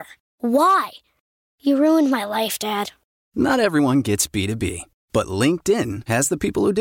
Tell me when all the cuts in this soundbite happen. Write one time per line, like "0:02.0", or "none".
none